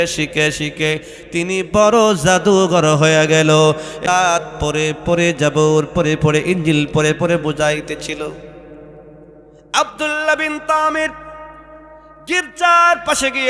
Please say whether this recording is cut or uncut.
cut